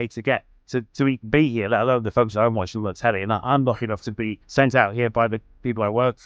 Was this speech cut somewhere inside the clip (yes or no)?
yes